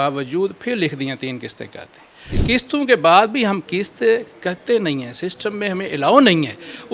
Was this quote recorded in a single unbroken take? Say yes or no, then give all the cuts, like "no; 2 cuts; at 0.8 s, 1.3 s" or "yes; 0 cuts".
no; 1 cut; at 2.3 s